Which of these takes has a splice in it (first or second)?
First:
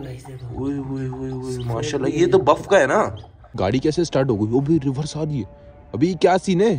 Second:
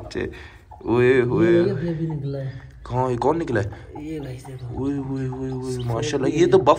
first